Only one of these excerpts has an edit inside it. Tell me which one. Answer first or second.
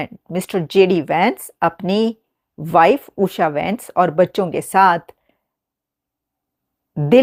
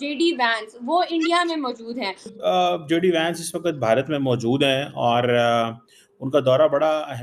second